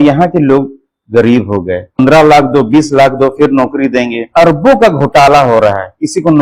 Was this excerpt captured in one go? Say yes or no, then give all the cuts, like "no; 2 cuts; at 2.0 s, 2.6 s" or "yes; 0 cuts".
no; 2 cuts; at 1.9 s, 4.2 s